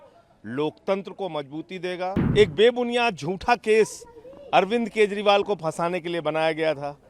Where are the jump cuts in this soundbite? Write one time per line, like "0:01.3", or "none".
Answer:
0:02.1